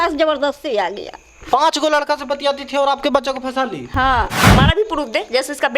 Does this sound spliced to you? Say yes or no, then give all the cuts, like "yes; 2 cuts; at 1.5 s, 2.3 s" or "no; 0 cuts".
yes; 1 cut; at 4.4 s